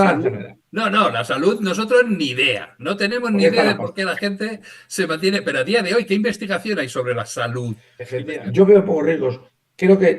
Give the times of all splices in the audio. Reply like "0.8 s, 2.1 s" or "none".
8.2 s